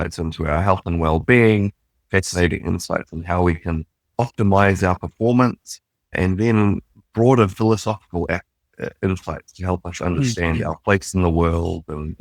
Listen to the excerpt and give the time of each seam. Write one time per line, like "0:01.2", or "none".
none

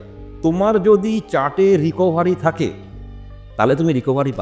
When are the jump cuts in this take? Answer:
none

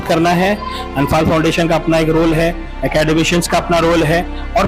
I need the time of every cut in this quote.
none

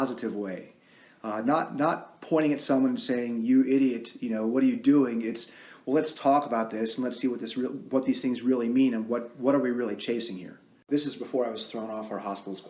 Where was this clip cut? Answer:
0:10.8

